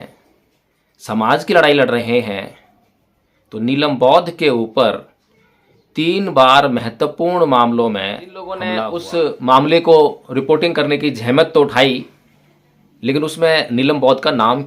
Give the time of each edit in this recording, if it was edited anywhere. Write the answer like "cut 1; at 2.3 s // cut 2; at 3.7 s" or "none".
cut 1; at 8.8 s

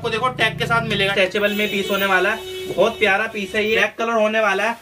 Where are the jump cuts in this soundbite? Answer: cut 1; at 1.1 s // cut 2; at 3.9 s

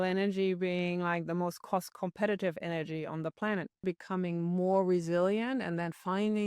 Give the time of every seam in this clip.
cut 1; at 3.8 s

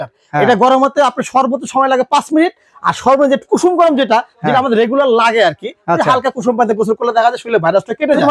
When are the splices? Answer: none

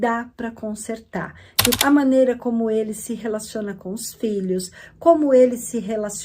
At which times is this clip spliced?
cut 1; at 1.8 s

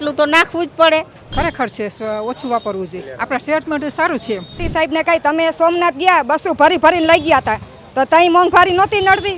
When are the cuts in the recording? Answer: cut 1; at 1.2 s // cut 2; at 4.6 s

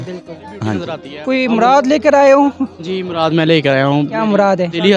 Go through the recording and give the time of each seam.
cut 1; at 1.1 s

